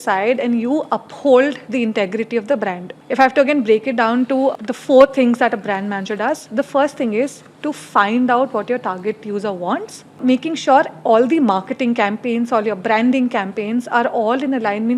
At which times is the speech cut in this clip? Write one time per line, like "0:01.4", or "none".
0:02.9
0:04.6
0:10.2